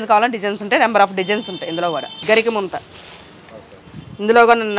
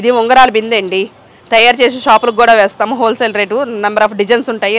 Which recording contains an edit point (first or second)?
first